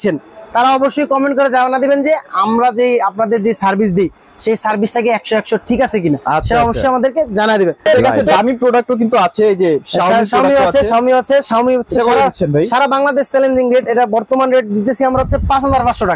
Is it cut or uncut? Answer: uncut